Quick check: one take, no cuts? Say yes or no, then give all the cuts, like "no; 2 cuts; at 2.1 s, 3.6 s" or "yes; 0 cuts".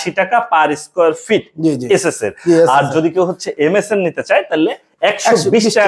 yes; 0 cuts